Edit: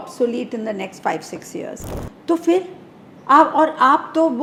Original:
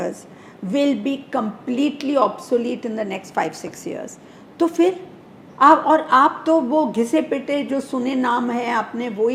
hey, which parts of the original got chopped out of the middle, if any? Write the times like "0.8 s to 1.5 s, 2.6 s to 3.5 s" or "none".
none